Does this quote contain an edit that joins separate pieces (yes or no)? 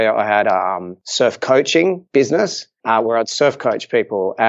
yes